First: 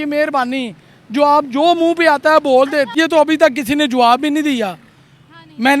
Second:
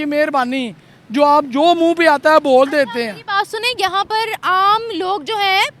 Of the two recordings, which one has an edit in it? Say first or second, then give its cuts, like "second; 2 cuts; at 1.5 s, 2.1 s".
first; 1 cut; at 2.9 s